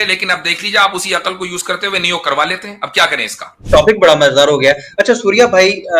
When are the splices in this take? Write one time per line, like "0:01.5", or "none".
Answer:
0:03.5